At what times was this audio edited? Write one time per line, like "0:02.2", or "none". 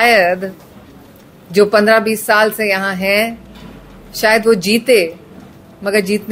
none